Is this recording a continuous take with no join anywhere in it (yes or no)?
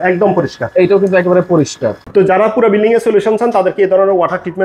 no